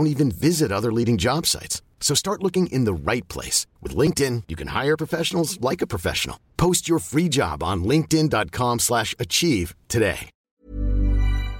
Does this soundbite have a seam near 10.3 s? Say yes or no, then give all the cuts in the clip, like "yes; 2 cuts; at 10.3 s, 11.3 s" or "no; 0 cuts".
yes; 1 cut; at 10.3 s